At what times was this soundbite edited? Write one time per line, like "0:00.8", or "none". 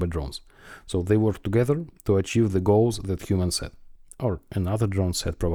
none